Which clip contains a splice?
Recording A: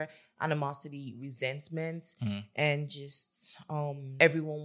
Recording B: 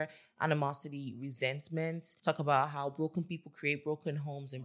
B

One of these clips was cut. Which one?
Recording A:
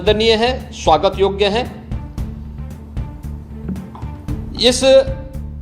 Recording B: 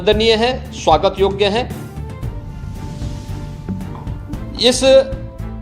A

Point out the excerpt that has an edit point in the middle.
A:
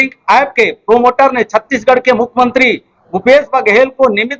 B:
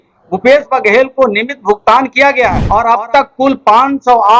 B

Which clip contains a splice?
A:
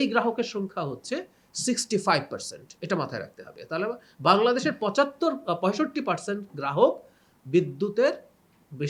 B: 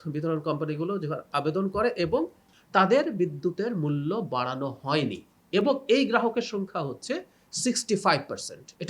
B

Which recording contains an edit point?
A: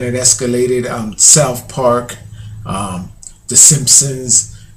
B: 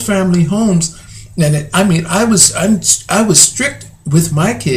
A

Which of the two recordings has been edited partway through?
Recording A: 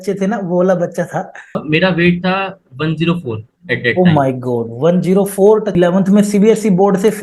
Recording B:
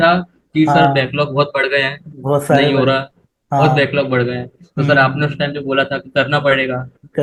A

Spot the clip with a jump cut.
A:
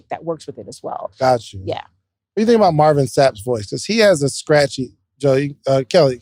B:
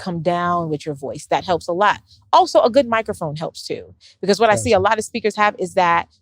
B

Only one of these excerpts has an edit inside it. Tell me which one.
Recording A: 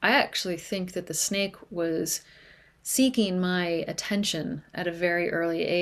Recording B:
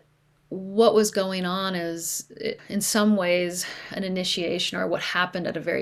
B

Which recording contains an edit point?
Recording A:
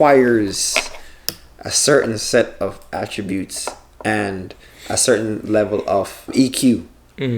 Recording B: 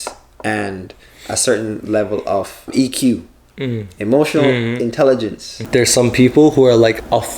B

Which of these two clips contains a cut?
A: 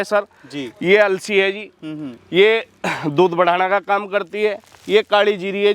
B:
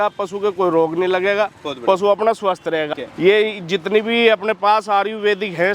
B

